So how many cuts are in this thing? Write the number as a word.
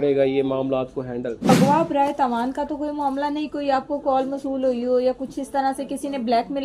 one